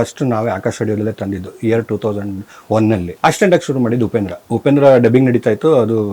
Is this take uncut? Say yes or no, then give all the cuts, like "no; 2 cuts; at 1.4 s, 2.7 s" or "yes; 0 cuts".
no; 2 cuts; at 3.1 s, 4.4 s